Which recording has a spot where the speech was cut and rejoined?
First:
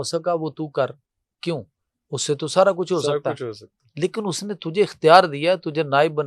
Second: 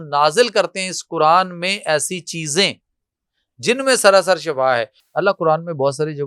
second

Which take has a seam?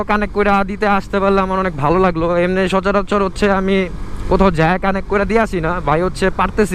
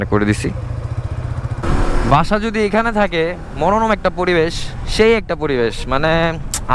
second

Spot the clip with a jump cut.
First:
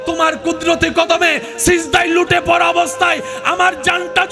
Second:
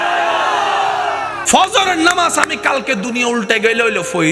second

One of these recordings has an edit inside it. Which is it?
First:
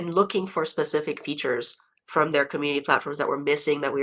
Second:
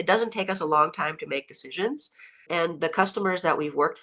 second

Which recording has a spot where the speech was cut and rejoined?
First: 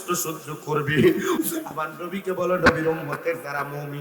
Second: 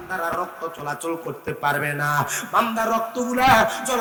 first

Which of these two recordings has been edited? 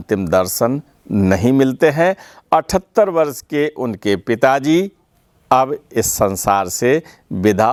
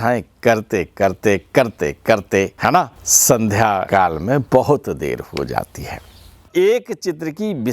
second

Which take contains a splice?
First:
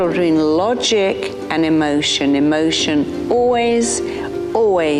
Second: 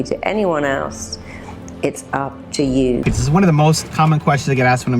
second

